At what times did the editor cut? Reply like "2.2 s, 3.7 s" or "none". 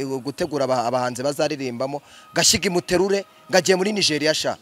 none